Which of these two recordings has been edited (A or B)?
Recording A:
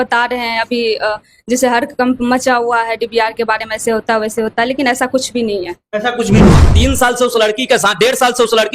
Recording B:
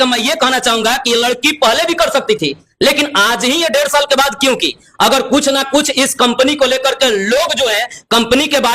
A